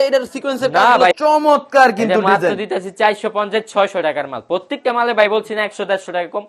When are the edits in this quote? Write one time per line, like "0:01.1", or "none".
0:01.1